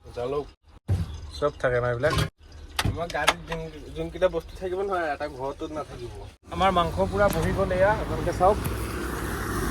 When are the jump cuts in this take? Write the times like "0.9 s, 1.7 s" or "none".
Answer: 6.4 s